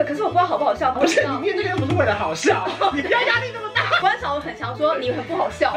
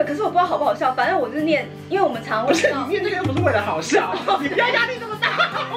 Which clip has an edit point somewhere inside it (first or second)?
first